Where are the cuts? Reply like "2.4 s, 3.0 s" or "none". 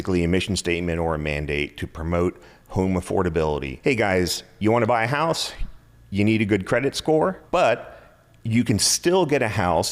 3.7 s, 7.4 s